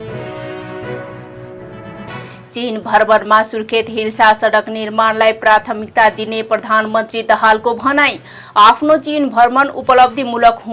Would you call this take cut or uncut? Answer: cut